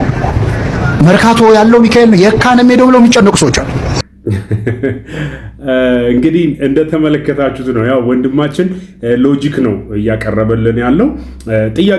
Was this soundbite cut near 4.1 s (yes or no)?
yes